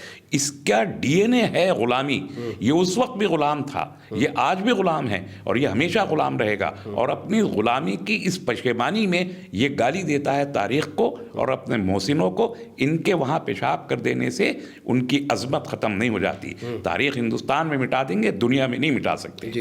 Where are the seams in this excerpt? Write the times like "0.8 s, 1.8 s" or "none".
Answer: none